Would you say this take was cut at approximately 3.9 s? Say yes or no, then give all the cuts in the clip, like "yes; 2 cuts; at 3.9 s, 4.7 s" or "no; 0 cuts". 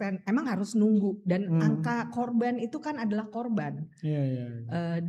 no; 0 cuts